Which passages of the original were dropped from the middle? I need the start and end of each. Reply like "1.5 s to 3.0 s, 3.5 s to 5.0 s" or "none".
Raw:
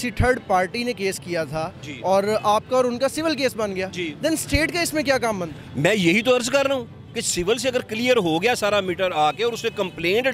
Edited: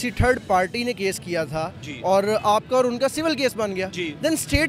none